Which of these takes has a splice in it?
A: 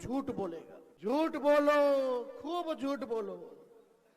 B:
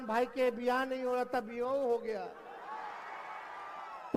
A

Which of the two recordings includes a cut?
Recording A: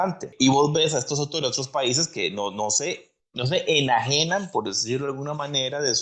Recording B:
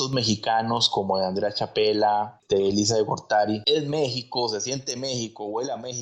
B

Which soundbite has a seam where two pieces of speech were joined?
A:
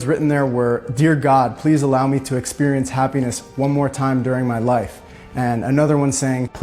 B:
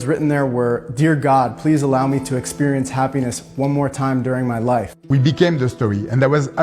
B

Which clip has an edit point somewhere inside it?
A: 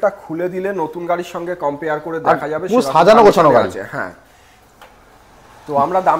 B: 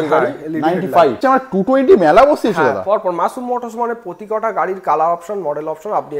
B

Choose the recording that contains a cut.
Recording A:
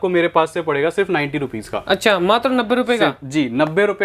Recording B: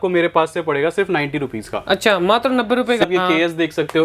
B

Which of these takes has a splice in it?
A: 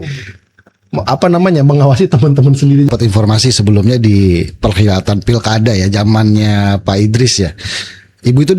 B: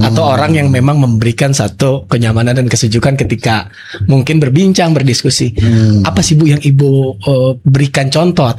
A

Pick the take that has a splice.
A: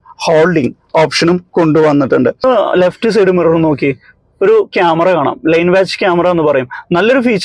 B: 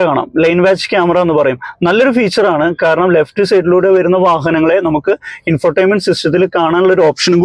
A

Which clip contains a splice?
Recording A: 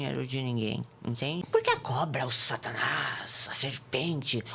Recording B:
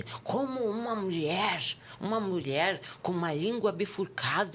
A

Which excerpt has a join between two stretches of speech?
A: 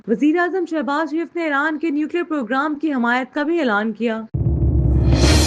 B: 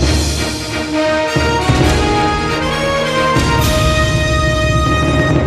A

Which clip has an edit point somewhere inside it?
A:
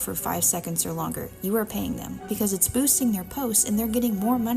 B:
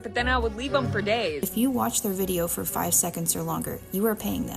B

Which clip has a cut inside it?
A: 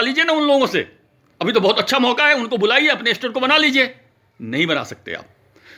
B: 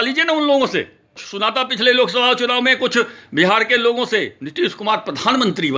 B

